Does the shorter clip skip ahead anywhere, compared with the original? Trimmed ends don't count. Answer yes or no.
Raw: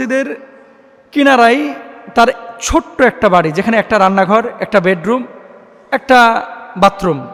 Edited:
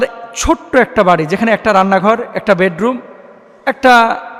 no